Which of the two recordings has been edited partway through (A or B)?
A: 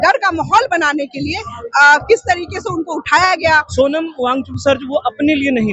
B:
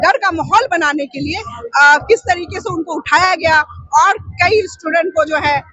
A